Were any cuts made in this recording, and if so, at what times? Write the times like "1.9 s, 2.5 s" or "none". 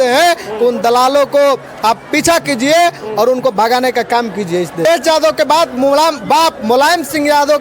4.8 s